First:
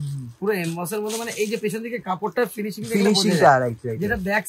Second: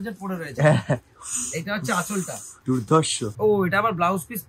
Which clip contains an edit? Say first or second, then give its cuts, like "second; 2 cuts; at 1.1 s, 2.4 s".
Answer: second; 2 cuts; at 2.4 s, 3.3 s